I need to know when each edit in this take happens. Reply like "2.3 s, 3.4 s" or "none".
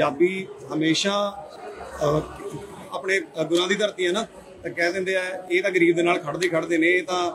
none